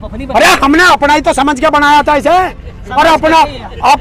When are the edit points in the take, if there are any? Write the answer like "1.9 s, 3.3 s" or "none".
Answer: none